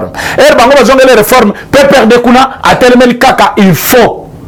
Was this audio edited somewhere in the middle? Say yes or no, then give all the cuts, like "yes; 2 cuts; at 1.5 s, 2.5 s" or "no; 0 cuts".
no; 0 cuts